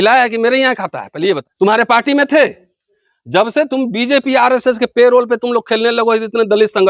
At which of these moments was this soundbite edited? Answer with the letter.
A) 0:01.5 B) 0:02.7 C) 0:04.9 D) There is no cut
A